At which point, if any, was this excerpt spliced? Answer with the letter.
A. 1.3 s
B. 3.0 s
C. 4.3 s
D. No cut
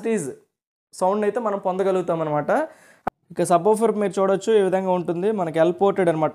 B